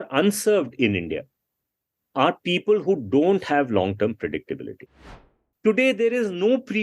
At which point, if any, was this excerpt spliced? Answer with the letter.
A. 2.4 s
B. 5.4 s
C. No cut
B